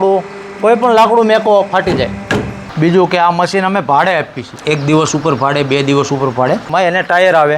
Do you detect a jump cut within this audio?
yes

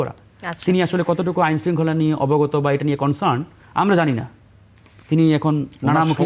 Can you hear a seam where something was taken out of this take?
no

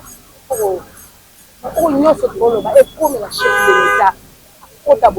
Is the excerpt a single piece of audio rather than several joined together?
yes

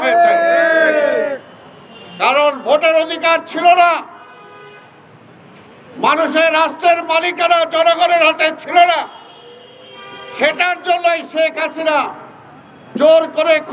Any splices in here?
no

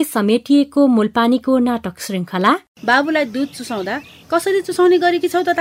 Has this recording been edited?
yes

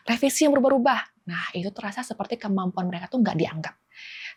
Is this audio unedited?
yes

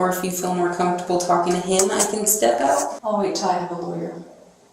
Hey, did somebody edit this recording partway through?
yes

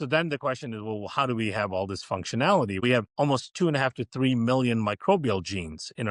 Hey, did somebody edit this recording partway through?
yes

